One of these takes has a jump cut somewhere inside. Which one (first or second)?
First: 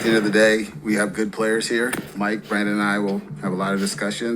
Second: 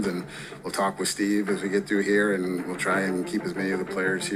first